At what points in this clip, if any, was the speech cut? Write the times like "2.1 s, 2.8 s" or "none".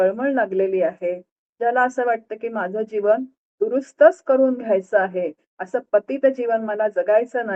none